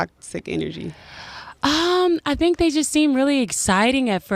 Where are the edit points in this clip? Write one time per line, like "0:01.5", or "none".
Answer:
none